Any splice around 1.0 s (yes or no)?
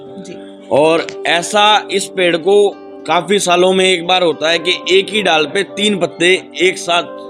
no